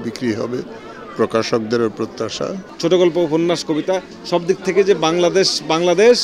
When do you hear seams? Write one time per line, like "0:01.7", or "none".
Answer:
0:02.6

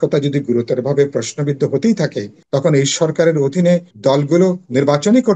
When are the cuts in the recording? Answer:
0:02.3
0:03.9

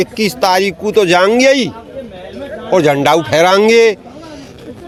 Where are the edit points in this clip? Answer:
none

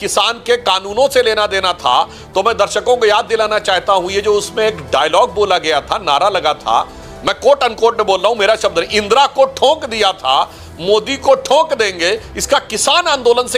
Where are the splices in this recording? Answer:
none

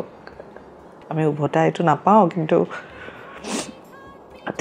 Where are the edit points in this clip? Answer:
none

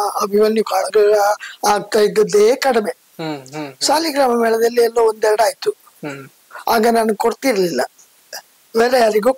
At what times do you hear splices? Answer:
none

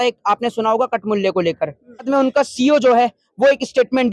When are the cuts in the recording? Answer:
0:02.1

